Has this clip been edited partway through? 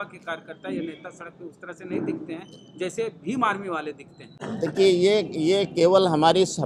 no; 0 cuts

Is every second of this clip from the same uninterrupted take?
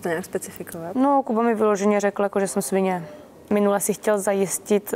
no; 1 cut; at 3.4 s

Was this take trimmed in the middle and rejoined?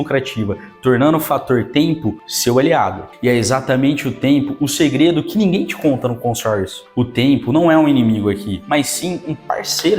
no; 0 cuts

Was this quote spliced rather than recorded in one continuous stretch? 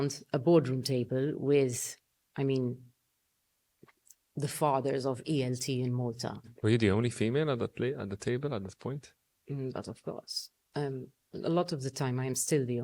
yes; 1 cut; at 6.5 s

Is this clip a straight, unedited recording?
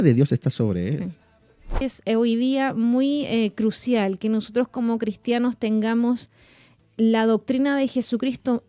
no; 1 cut; at 1.8 s

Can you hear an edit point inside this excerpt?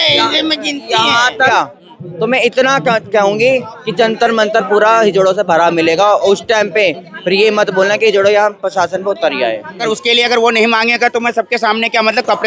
yes; 2 cuts; at 1.5 s, 9.8 s

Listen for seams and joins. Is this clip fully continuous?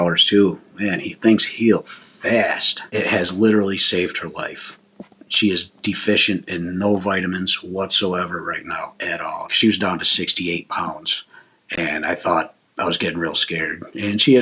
no; 2 cuts; at 2.7 s, 9.5 s

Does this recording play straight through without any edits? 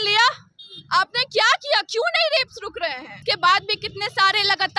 no; 1 cut; at 3.1 s

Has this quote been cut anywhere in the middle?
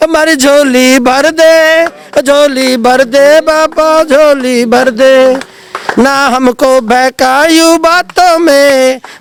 no; 0 cuts

